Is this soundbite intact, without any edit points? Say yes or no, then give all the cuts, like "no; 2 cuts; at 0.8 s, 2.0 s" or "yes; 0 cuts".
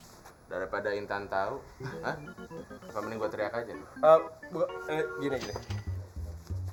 yes; 0 cuts